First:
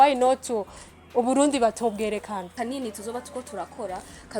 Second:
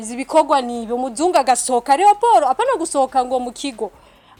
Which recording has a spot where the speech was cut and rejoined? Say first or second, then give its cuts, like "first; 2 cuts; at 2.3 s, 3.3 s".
first; 1 cut; at 2.5 s